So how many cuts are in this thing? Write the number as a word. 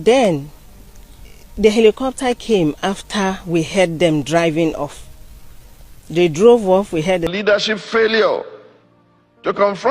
one